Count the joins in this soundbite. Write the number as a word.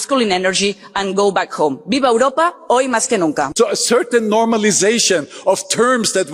two